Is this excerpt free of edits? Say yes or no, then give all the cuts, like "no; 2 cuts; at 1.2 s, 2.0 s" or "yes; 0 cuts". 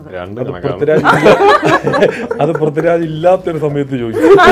yes; 0 cuts